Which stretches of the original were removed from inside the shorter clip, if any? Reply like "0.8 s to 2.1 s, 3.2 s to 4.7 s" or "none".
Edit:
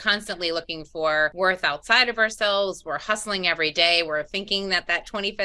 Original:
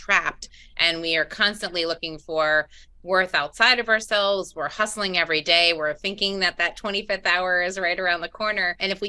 2.7 s to 3.0 s